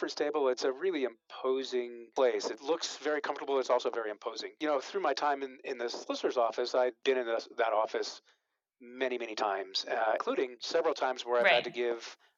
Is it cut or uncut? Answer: uncut